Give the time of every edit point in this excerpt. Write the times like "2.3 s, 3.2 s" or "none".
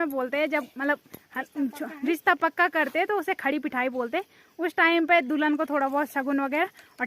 none